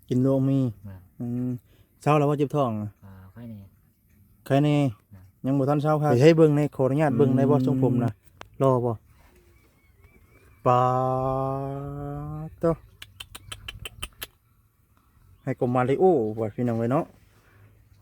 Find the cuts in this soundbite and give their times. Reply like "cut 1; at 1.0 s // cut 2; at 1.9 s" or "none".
cut 1; at 6.1 s